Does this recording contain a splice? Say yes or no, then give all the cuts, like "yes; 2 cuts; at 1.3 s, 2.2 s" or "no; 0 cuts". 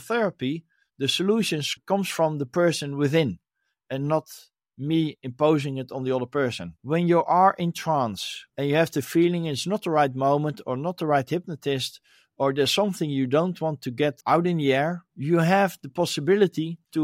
yes; 2 cuts; at 1.7 s, 6.7 s